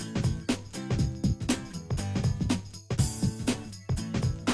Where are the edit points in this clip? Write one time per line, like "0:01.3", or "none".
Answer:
0:00.9
0:02.8